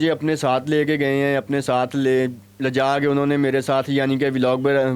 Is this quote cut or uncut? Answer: uncut